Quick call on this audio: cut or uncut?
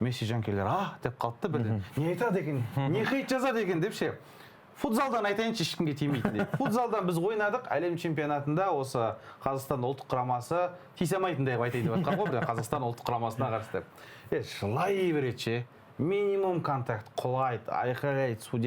uncut